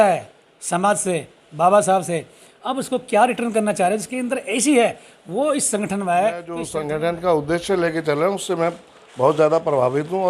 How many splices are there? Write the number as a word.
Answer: one